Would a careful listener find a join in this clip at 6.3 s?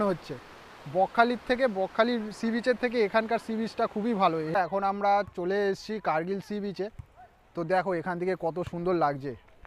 no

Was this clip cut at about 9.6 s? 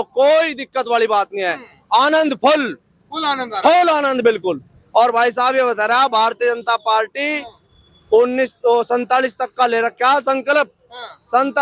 no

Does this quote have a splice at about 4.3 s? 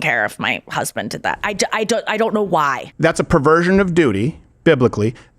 no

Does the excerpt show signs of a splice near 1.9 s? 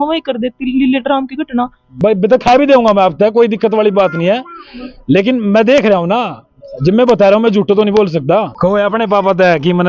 yes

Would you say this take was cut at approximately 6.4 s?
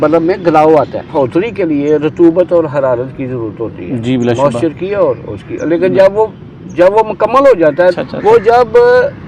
no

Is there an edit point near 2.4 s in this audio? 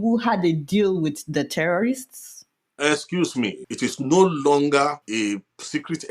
no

